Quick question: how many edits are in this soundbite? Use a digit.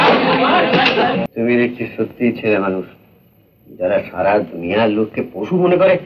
1